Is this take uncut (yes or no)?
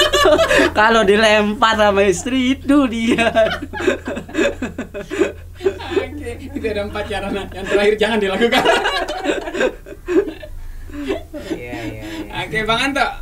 yes